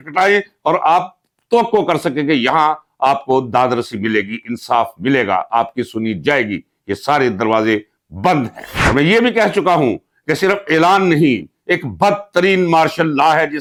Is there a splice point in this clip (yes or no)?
no